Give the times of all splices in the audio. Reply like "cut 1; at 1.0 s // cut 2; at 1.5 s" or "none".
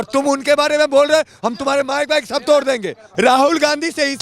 cut 1; at 3.0 s